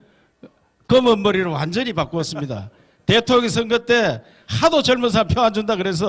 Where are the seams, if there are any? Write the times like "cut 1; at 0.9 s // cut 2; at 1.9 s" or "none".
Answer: cut 1; at 1.2 s